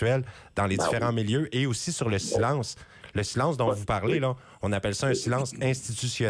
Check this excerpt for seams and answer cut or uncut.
uncut